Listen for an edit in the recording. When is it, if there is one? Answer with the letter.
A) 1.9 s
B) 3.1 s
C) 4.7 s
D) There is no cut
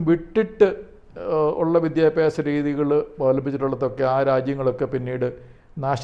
D